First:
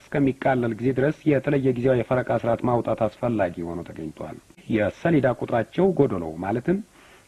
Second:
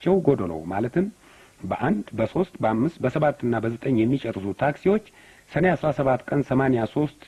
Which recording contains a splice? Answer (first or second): first